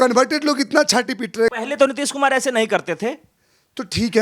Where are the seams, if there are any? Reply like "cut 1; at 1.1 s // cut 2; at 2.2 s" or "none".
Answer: cut 1; at 1.6 s